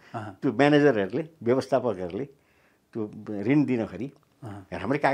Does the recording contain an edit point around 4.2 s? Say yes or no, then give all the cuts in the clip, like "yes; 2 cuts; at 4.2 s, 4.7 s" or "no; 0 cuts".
no; 0 cuts